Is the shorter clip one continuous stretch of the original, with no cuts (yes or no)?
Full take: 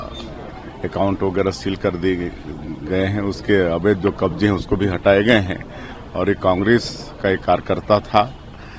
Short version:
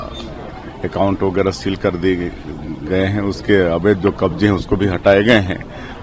yes